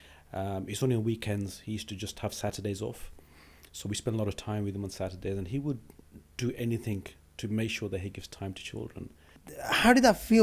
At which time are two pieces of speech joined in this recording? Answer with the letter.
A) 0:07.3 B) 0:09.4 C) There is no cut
B